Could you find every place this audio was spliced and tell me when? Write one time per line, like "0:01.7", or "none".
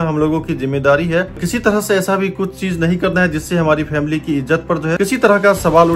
0:01.5